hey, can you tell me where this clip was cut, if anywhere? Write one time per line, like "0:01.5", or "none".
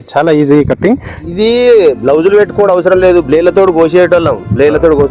0:01.2